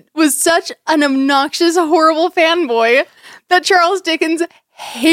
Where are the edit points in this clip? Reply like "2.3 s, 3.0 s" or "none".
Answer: none